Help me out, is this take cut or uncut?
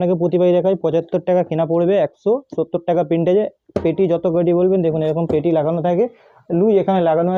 uncut